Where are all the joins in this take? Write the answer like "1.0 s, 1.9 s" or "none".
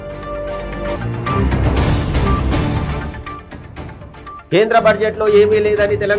0.9 s